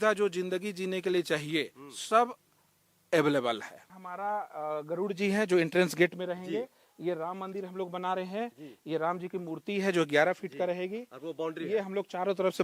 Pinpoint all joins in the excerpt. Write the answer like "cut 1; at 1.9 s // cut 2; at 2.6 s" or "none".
cut 1; at 3.7 s

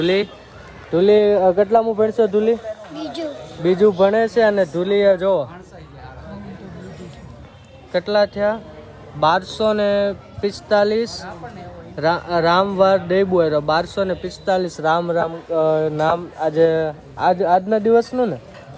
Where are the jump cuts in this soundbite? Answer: none

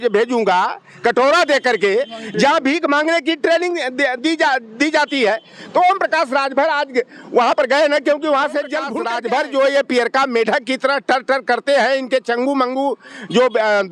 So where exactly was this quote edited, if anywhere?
cut 1; at 9.0 s

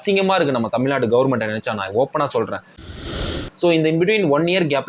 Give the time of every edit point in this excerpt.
cut 1; at 3.0 s

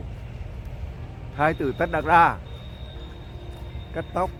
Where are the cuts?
none

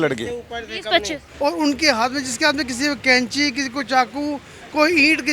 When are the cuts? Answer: cut 1; at 1.2 s

